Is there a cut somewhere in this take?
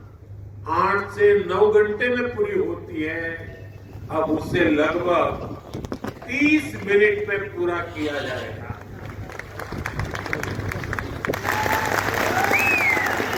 no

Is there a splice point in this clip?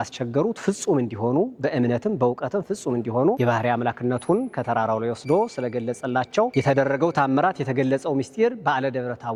no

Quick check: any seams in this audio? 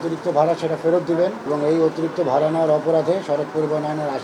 yes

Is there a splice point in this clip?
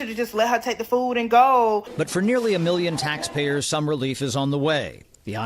yes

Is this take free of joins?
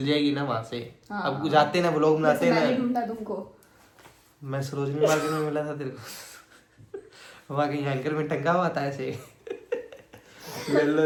yes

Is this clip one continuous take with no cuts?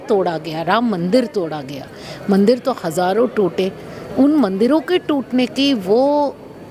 yes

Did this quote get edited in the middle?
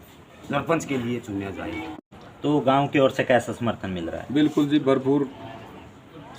yes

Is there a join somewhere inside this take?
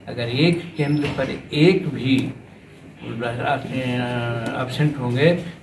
no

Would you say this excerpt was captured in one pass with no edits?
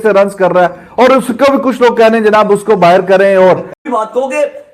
no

